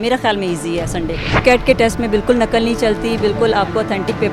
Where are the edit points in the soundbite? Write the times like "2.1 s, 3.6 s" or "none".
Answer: 1.4 s